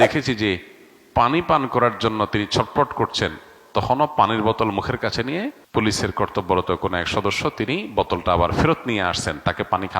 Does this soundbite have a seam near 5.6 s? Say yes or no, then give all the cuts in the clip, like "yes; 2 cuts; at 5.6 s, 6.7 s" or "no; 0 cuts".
yes; 1 cut; at 5.6 s